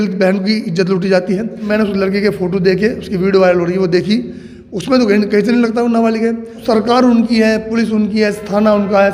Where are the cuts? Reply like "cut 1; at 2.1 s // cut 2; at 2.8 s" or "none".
cut 1; at 1.7 s // cut 2; at 6.5 s